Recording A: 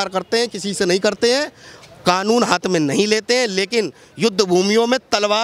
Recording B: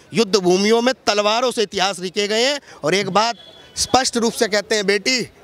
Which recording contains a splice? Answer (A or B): B